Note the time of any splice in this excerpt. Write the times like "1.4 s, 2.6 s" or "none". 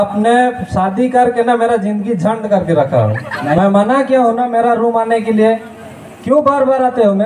3.6 s